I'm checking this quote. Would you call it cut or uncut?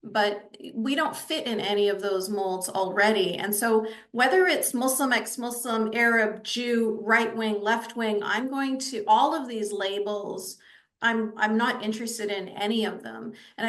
uncut